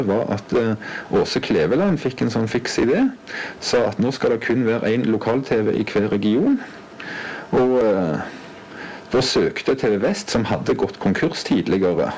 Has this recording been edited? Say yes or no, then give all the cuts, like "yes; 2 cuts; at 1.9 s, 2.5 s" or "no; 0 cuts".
no; 0 cuts